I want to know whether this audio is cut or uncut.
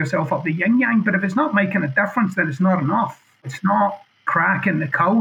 cut